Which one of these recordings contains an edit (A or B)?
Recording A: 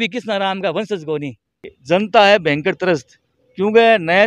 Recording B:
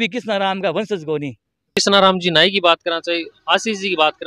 A